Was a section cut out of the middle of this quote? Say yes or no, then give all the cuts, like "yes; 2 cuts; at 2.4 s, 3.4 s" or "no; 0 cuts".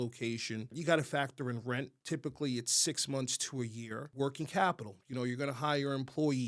yes; 3 cuts; at 0.8 s, 2.0 s, 4.1 s